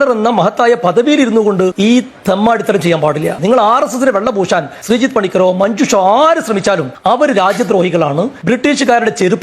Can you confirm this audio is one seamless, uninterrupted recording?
no; 4 cuts; at 1.7 s, 4.7 s, 6.9 s, 8.4 s

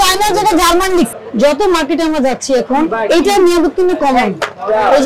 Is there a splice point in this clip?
yes; 1 cut; at 1.1 s

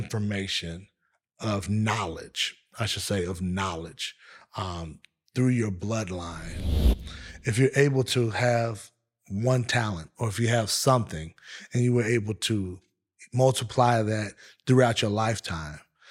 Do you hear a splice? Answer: yes; 1 cut; at 6.8 s

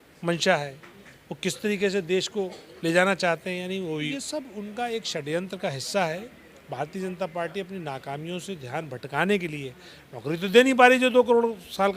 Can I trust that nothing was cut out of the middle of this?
no; 1 cut; at 4.1 s

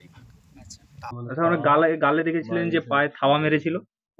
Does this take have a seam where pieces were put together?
yes; 1 cut; at 1.1 s

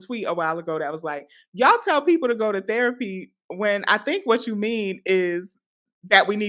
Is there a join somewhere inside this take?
no; 0 cuts

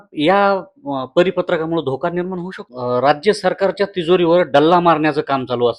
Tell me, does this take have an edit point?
yes; 1 cut; at 2.7 s

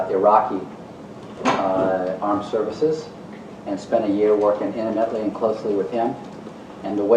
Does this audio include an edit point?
no; 0 cuts

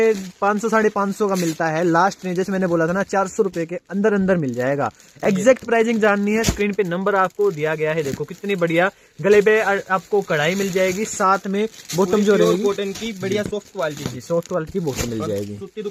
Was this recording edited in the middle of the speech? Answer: no; 0 cuts

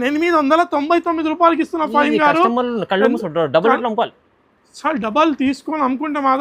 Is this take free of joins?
yes; 0 cuts

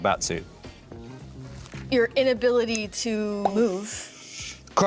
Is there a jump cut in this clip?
yes; 1 cut; at 3.4 s

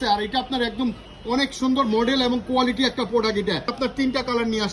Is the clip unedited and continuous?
no; 1 cut; at 3.7 s

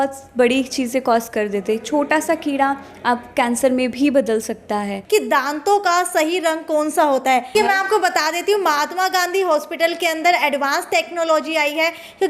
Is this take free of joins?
no; 2 cuts; at 5.0 s, 7.5 s

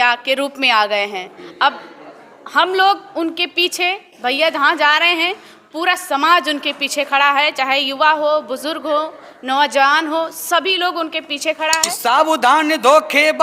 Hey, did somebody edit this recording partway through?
yes; 1 cut; at 11.9 s

